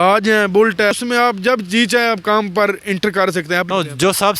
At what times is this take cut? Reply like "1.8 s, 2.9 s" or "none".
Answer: 0.9 s, 3.7 s